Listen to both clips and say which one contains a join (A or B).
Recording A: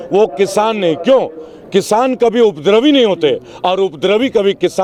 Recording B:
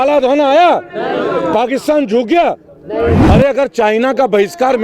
B